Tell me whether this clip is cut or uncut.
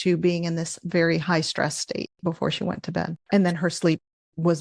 cut